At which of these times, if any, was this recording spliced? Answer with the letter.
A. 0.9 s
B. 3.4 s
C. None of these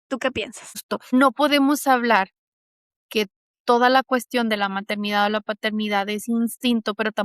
A